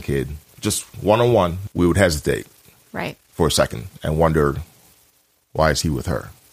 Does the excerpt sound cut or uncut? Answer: cut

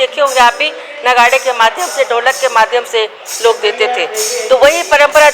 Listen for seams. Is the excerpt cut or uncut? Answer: uncut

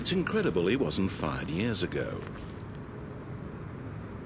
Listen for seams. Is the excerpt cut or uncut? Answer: cut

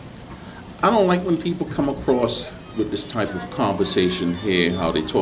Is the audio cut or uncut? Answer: uncut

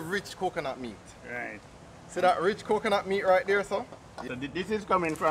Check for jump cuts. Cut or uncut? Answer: cut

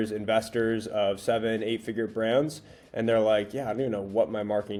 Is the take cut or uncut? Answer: uncut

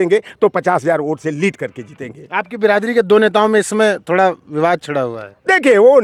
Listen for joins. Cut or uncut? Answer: uncut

